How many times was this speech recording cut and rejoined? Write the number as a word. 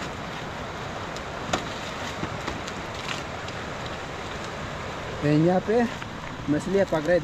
zero